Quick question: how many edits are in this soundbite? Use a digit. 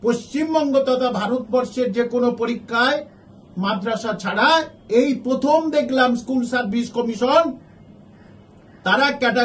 0